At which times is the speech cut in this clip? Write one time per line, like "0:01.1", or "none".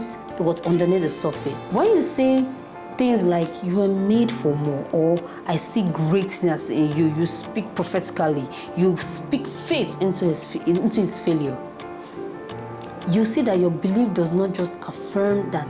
0:01.5